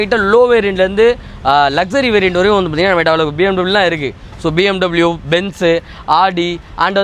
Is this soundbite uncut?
yes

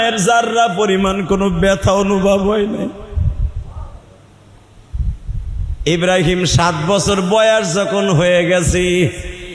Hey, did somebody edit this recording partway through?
yes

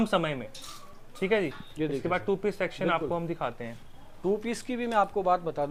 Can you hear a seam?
no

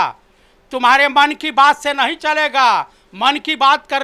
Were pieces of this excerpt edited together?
no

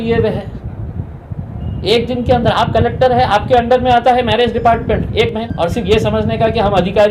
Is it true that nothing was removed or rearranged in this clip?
no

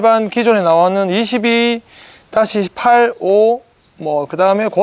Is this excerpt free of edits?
yes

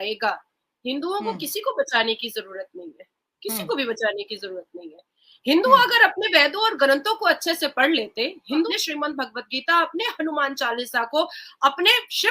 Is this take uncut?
no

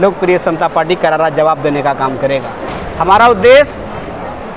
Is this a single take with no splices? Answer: no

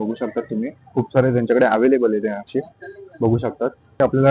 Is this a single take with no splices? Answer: yes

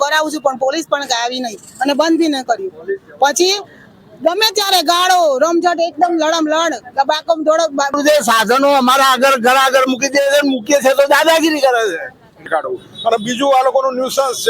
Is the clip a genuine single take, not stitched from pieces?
no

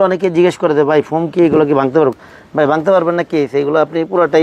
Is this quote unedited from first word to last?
yes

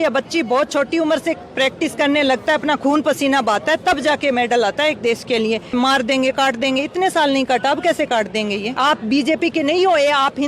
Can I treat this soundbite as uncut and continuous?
no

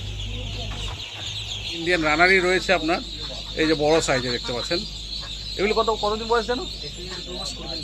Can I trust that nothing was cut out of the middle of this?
no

